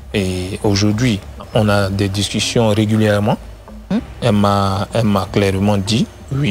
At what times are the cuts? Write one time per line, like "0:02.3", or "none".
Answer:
0:01.4